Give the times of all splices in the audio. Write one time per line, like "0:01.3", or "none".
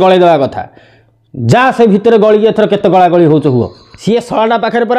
0:03.9